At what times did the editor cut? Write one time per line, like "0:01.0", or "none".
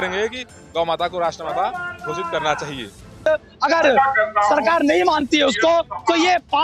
0:03.3

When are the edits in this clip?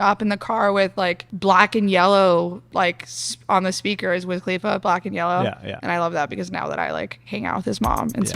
0:01.3
0:02.6

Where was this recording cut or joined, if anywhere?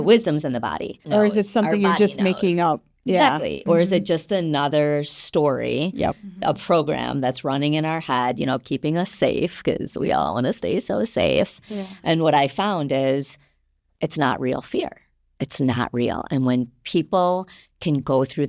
0:01.1

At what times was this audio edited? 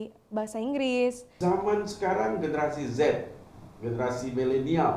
0:01.3

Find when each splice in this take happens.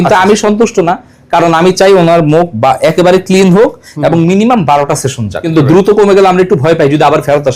0:05.5

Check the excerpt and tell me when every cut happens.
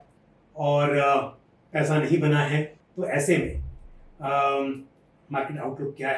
0:02.8

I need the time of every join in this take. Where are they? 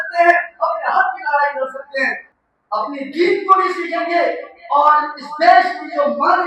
0:02.3

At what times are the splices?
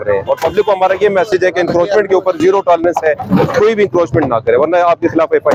none

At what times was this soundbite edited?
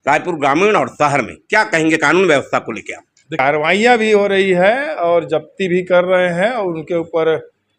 0:03.4

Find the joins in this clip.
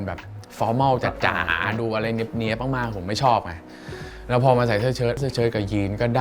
0:05.2

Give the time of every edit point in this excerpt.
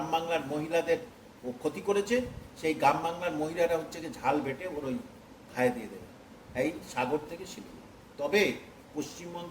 none

